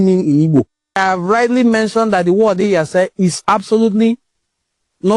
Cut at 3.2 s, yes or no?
no